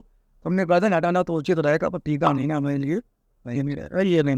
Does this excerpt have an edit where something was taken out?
no; 0 cuts

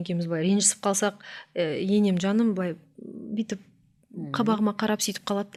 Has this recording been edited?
no; 0 cuts

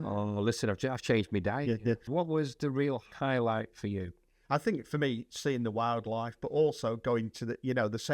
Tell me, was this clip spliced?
yes; 1 cut; at 2.0 s

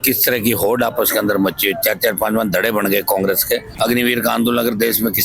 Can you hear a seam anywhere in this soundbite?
yes; 1 cut; at 3.7 s

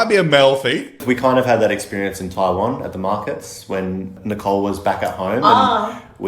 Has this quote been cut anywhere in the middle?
yes; 2 cuts; at 1.0 s, 4.2 s

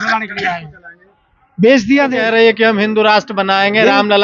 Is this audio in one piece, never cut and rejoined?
no; 1 cut; at 2.1 s

